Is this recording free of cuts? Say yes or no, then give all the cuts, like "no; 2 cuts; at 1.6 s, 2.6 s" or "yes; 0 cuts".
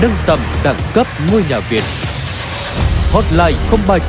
yes; 0 cuts